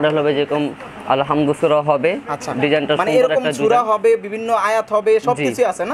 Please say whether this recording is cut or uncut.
uncut